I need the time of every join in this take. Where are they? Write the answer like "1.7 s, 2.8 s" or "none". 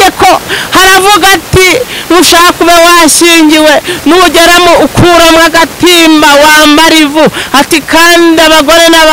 none